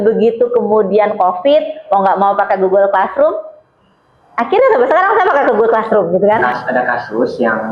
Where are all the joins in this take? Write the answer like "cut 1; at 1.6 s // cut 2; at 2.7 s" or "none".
cut 1; at 6.5 s